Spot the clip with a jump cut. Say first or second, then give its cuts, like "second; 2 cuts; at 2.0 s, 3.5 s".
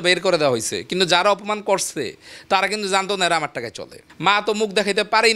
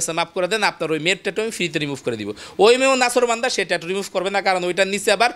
first; 1 cut; at 4.0 s